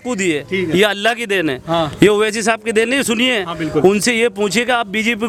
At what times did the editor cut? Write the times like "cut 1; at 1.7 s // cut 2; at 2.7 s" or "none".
none